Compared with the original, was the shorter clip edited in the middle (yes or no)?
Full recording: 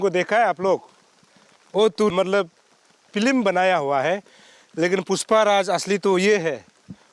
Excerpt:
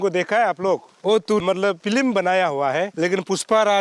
yes